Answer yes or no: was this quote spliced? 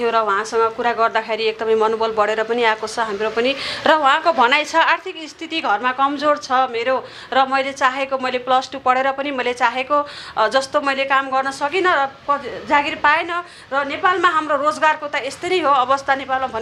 no